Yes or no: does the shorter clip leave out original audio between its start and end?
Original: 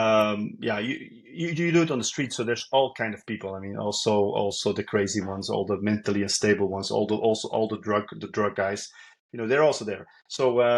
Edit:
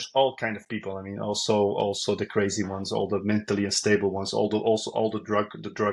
no